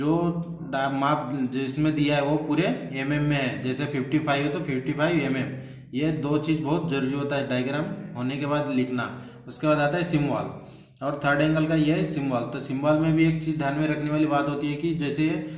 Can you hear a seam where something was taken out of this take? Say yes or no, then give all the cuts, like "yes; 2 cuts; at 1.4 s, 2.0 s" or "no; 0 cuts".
no; 0 cuts